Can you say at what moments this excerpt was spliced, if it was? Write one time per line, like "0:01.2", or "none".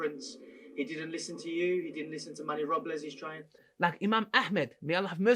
0:03.7